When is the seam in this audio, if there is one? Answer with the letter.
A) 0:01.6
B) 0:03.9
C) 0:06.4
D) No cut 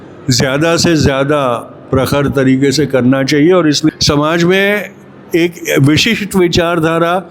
B